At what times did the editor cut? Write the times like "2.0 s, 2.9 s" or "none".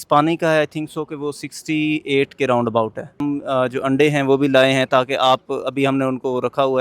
3.2 s